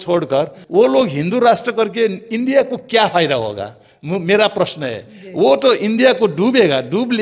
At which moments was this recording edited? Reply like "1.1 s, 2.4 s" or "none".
none